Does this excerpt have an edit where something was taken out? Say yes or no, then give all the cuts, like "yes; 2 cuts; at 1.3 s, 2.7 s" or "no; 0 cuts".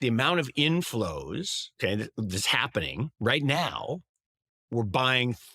yes; 2 cuts; at 1.6 s, 3.1 s